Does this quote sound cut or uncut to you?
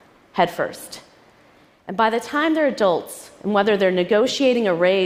uncut